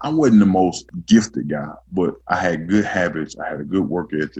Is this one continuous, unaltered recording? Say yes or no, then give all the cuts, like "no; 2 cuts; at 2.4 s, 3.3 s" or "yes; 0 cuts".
no; 2 cuts; at 0.9 s, 2.2 s